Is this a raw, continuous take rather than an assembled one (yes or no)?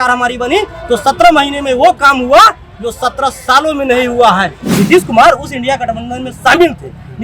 no